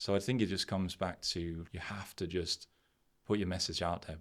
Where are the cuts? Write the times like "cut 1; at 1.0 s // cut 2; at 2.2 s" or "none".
cut 1; at 1.6 s